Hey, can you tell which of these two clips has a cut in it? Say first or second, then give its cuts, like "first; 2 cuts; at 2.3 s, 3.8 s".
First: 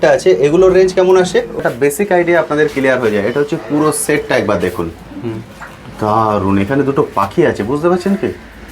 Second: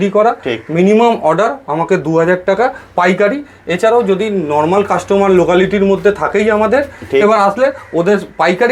first; 1 cut; at 1.6 s